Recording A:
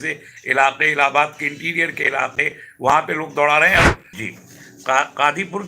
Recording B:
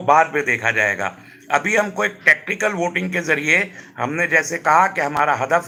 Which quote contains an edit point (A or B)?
A